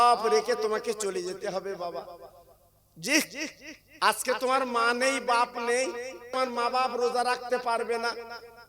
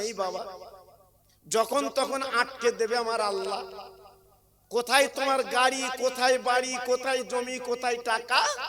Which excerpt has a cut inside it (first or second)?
first